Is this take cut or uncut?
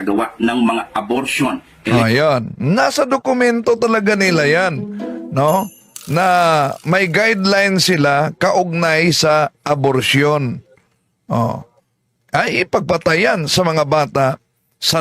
uncut